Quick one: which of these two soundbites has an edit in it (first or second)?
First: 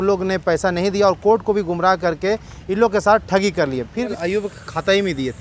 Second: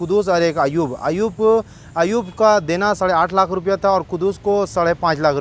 first